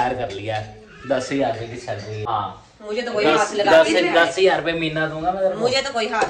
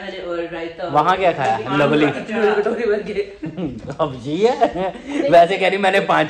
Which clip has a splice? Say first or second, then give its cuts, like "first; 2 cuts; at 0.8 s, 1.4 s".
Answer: first; 1 cut; at 2.3 s